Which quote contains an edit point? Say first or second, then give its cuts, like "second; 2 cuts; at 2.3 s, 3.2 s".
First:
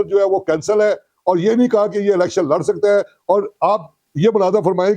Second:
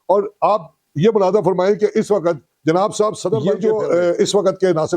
second; 1 cut; at 3.5 s